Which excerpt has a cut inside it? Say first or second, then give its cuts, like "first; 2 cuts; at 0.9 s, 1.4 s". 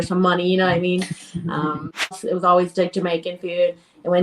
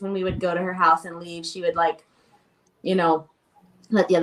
first; 1 cut; at 2.3 s